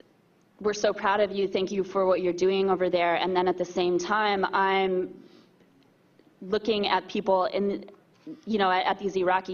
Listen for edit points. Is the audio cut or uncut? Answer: uncut